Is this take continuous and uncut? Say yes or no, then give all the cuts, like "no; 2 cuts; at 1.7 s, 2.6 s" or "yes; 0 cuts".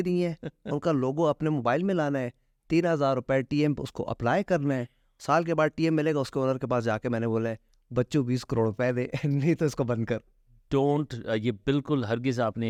yes; 0 cuts